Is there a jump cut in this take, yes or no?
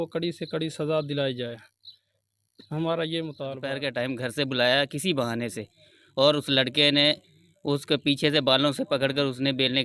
yes